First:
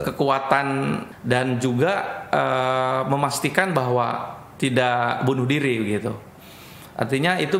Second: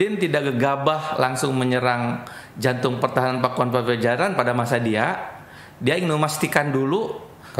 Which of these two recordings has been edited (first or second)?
first